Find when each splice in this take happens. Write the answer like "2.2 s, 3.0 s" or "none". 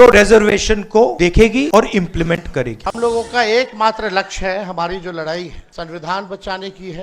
2.8 s